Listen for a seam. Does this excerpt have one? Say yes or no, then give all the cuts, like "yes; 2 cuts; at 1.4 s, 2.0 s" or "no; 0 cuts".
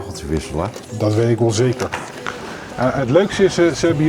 yes; 1 cut; at 2.4 s